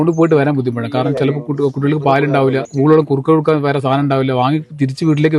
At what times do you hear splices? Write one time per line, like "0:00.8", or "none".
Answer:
0:02.7